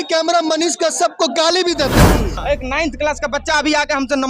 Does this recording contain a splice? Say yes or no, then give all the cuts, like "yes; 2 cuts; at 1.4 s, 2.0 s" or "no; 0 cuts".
yes; 1 cut; at 2.3 s